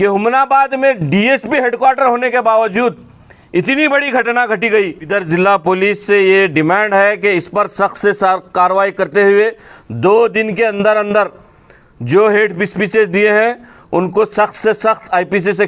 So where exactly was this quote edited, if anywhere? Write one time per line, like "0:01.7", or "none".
0:05.1